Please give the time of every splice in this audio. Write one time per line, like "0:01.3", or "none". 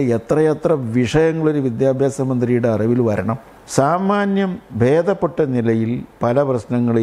0:03.5